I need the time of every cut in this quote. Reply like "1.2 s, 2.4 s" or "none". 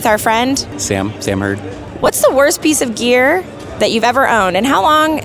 1.8 s